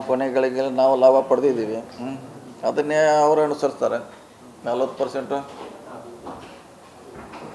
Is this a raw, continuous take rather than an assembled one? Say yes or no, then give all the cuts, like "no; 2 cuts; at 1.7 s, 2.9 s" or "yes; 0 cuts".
yes; 0 cuts